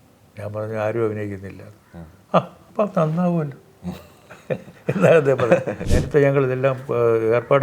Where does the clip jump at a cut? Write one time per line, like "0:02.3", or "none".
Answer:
0:05.9